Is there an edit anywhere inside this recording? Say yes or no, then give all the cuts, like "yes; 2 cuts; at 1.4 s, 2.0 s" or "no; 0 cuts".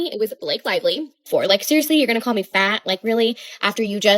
yes; 1 cut; at 1.2 s